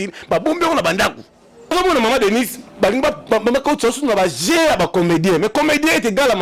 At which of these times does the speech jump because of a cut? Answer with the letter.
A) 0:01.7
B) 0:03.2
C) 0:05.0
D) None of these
A